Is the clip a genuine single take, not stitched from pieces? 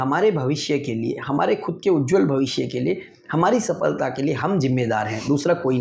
yes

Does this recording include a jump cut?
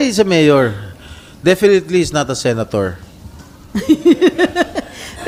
no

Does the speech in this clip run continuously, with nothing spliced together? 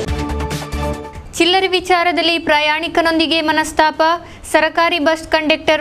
yes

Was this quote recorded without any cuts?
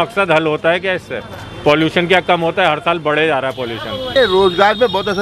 no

